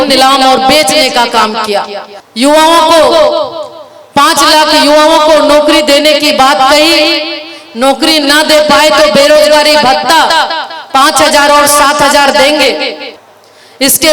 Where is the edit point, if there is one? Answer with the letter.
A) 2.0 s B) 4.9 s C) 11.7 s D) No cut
A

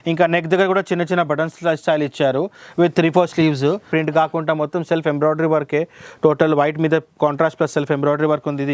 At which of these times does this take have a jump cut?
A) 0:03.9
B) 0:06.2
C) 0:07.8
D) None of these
A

